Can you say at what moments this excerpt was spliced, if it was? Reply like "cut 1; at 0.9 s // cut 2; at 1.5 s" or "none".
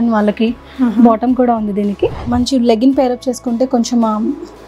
cut 1; at 2.2 s